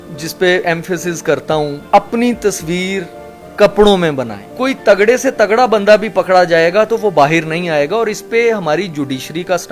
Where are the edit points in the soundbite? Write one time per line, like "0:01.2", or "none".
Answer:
0:04.4